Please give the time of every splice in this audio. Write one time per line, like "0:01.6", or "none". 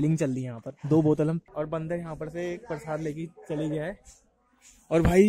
0:01.5

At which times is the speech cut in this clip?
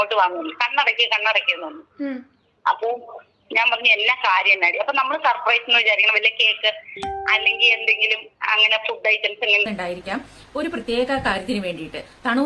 0:09.7

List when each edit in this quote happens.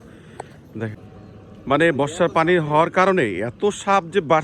0:00.9

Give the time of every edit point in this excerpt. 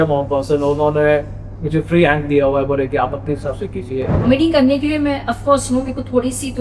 0:04.2

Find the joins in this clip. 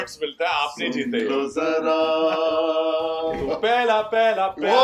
0:03.4

